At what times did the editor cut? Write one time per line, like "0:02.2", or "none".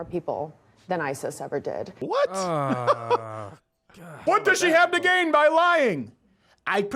0:01.9
0:04.2